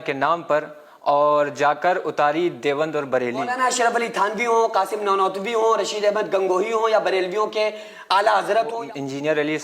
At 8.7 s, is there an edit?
yes; 2 cuts; at 3.5 s, 8.7 s

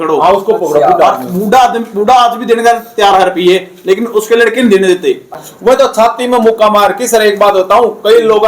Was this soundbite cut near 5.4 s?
yes; 1 cut; at 5.4 s

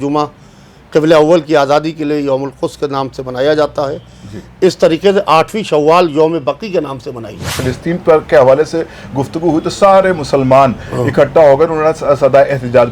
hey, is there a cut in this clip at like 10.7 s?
no; 1 cut; at 7.6 s

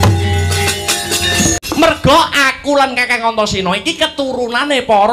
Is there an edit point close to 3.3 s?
no; 1 cut; at 1.5 s

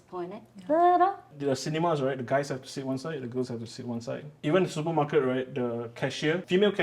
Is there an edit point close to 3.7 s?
no; 1 cut; at 1.2 s

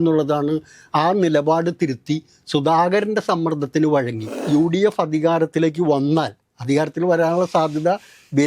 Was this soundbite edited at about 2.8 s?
no; 1 cut; at 4.4 s

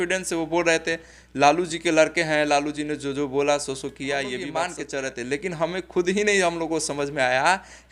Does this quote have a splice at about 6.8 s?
no; 1 cut; at 4.6 s

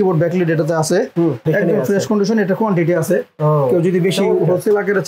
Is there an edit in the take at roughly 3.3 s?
no; 1 cut; at 1.4 s

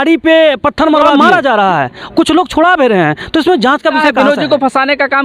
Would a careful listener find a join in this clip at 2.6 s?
no; 2 cuts; at 1.1 s, 4.1 s

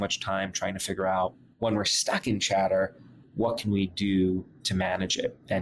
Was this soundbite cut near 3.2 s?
no; 2 cuts; at 1.4 s, 4.6 s

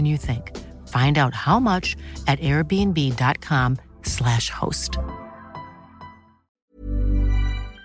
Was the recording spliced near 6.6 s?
yes; 1 cut; at 6.6 s

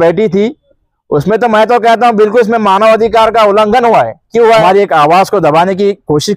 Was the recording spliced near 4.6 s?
yes; 1 cut; at 4.6 s

